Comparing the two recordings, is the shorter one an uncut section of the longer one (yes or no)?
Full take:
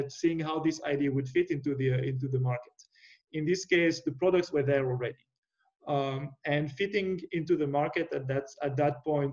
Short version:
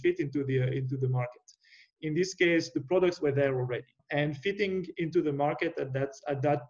no